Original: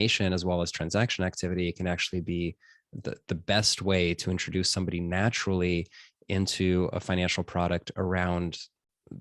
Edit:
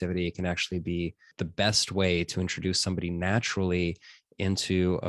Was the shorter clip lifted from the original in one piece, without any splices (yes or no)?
no